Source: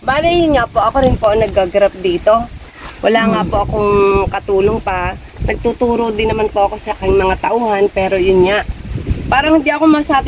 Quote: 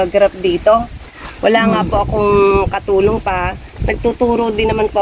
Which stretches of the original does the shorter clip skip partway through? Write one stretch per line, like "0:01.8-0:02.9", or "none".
none